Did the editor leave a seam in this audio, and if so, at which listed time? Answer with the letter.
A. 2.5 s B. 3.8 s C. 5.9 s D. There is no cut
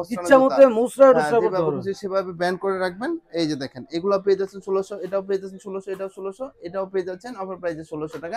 D